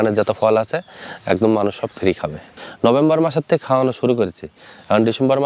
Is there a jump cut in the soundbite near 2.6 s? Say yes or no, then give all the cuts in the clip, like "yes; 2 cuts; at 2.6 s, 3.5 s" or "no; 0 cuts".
yes; 1 cut; at 2.6 s